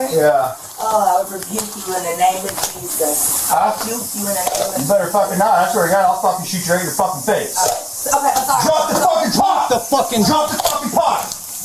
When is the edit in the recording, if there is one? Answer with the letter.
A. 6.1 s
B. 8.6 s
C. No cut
C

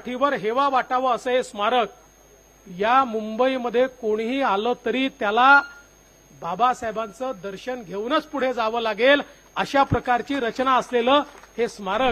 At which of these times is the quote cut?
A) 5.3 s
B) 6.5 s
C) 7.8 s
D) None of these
D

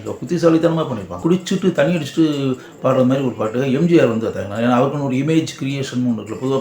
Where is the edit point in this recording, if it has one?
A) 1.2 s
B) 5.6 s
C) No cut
A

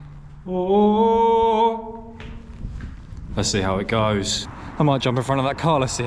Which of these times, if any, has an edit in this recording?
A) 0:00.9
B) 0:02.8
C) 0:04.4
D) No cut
C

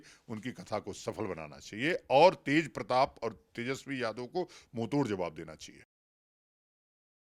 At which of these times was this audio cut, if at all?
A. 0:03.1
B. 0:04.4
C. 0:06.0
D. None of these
D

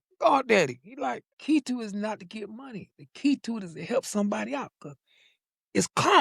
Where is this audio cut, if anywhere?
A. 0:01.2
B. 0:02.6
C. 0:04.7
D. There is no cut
A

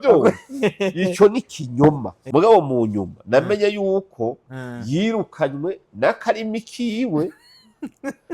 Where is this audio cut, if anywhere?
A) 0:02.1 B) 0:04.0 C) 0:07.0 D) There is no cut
A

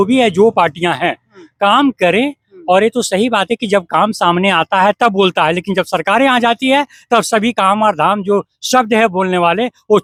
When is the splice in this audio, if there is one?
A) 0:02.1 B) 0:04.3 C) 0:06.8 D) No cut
D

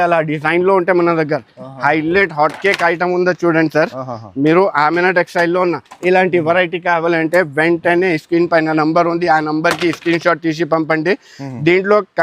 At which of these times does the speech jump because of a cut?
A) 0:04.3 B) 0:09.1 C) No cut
C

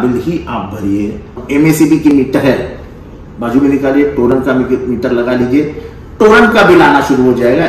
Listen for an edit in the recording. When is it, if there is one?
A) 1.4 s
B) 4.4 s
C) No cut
A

